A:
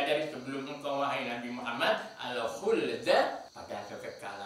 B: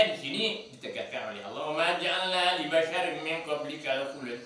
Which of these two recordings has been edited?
A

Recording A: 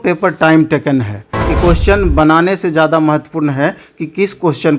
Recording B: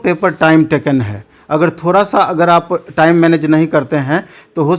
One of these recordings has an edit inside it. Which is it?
A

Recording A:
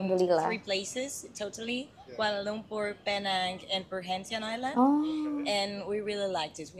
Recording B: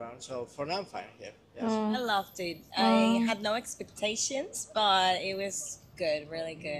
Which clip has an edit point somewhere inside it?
B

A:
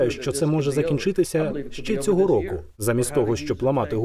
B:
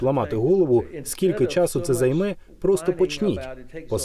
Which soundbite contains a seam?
A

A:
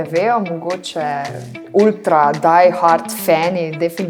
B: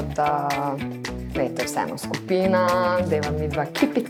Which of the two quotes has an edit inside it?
A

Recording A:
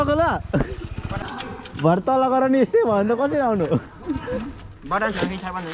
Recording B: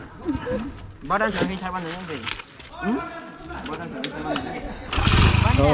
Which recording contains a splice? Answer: A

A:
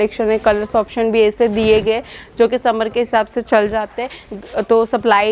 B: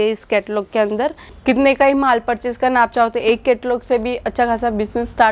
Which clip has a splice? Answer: B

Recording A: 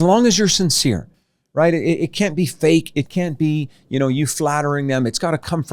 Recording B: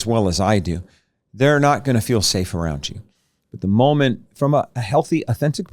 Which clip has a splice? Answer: B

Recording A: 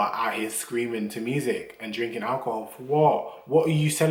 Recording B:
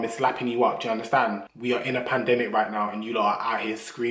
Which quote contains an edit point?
B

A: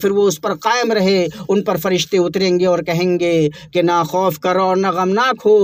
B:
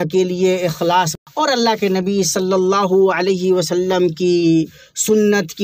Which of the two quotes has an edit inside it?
B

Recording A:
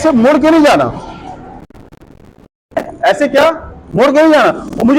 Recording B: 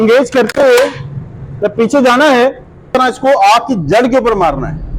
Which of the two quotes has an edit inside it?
B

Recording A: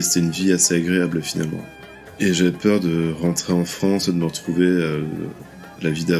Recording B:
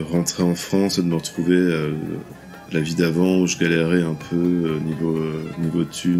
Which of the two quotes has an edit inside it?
A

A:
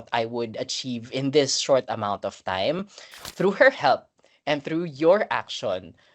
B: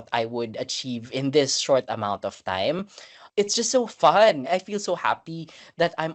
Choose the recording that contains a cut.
A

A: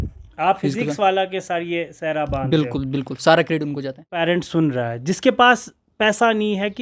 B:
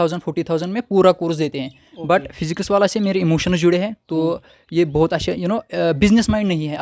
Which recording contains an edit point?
A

